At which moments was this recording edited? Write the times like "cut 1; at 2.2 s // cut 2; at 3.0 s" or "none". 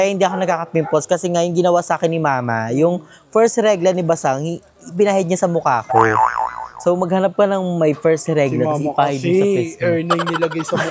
none